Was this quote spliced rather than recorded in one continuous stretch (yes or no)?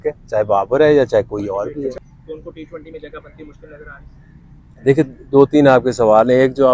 yes